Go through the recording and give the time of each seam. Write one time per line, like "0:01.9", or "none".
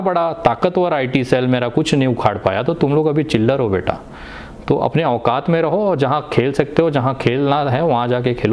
none